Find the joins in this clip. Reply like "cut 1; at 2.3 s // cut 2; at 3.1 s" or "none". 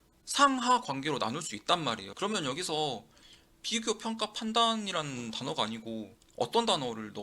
cut 1; at 2.1 s // cut 2; at 6.2 s